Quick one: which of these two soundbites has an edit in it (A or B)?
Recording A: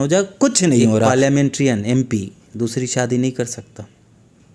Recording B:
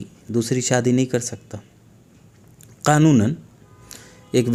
A